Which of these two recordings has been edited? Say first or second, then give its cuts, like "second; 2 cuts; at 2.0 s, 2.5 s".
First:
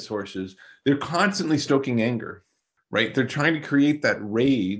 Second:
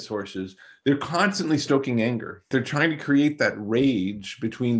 second; 1 cut; at 2.5 s